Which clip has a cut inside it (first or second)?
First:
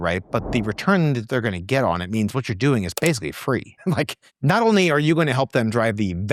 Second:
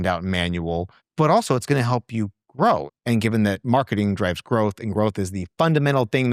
second